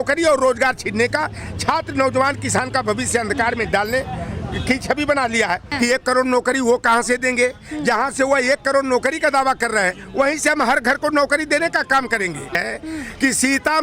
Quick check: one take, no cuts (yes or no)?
no